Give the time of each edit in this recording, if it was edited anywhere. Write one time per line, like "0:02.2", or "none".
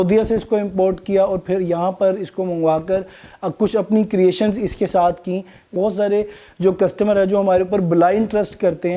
0:05.7